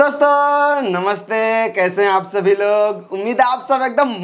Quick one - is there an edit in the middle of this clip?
no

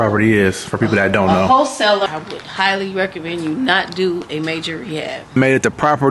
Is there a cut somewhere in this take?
yes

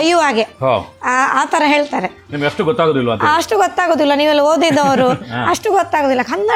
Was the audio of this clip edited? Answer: no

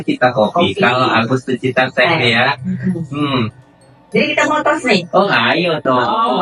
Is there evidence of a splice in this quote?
no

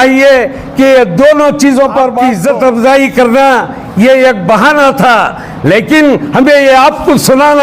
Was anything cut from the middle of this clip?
yes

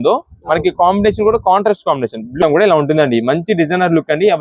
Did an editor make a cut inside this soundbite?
yes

